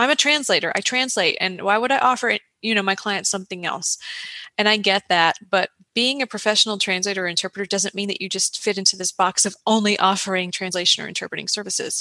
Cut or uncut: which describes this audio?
uncut